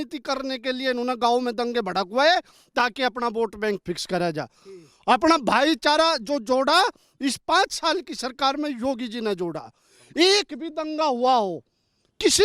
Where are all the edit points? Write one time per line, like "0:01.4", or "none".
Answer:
none